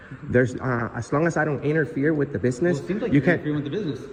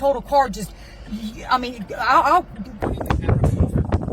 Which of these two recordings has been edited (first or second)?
second